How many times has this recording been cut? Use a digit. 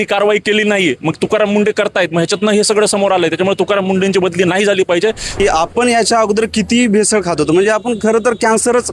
1